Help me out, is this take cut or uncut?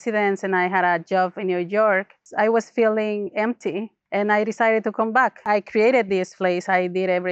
cut